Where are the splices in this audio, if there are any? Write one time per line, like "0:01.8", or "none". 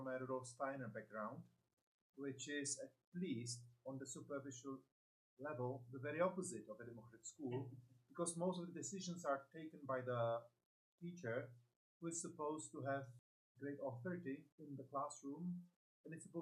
0:13.2
0:14.6